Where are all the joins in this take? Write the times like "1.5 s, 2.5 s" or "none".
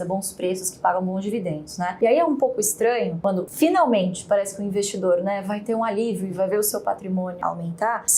none